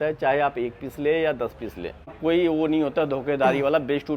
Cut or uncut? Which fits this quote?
cut